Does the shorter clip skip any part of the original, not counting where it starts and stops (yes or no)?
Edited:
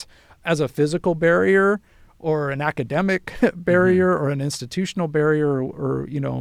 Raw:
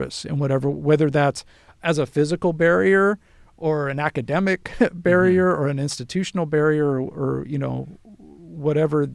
no